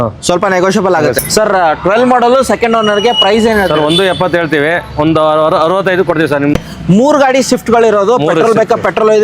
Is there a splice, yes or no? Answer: yes